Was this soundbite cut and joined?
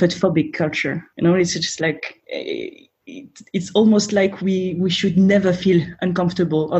yes; 2 cuts; at 1.2 s, 2.1 s

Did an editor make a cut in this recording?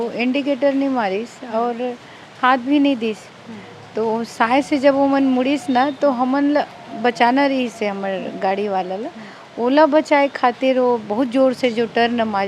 no; 0 cuts

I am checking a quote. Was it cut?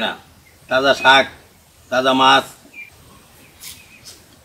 no; 0 cuts

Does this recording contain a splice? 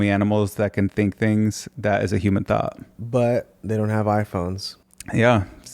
yes; 1 cut; at 2.9 s

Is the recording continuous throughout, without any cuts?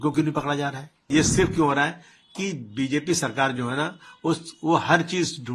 no; 1 cut; at 1.1 s

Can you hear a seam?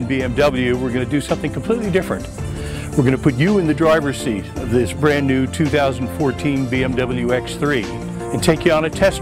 yes; 1 cut; at 8.0 s

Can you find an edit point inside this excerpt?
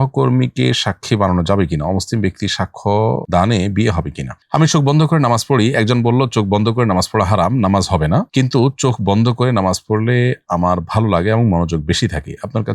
yes; 1 cut; at 4.3 s

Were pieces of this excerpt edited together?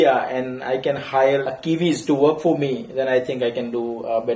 yes; 1 cut; at 1.4 s

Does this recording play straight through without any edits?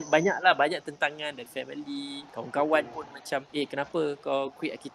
no; 3 cuts; at 1.4 s, 2.3 s, 3.5 s

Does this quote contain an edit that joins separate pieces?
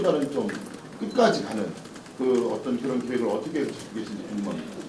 no; 0 cuts

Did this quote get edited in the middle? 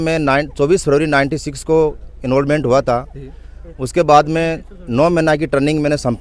no; 0 cuts

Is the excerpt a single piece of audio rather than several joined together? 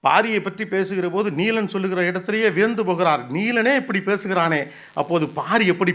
yes; 0 cuts

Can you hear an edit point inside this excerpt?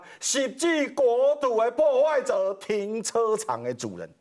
no; 0 cuts

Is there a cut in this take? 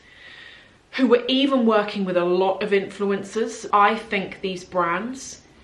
yes; 1 cut; at 3.6 s

